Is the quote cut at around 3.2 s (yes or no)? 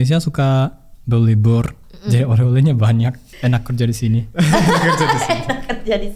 yes